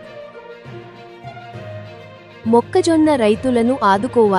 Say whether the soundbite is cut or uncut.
uncut